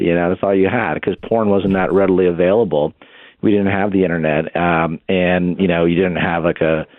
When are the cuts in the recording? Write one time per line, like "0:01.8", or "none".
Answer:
none